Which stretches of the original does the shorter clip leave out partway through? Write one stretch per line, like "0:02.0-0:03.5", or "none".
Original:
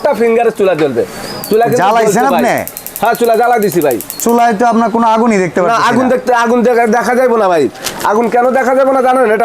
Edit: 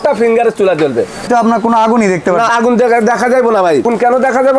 0:01.3-0:04.6
0:05.8-0:06.4
0:07.7-0:08.2